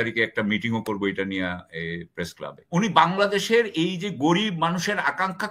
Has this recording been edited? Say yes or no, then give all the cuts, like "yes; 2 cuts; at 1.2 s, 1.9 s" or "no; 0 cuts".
yes; 1 cut; at 2.5 s